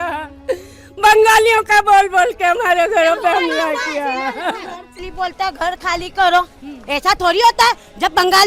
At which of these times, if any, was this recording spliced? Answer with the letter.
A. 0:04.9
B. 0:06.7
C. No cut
A